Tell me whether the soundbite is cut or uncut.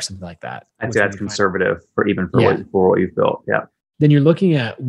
cut